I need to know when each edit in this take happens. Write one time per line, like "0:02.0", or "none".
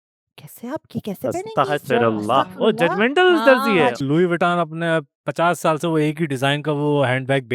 0:04.0